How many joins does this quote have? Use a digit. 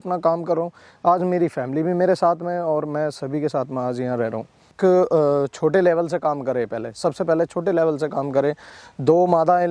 1